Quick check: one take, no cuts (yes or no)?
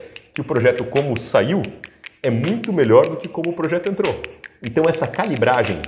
yes